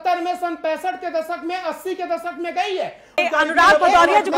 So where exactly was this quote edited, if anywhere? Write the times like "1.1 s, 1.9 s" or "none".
3.2 s